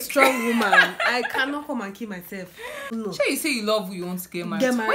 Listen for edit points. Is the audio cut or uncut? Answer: cut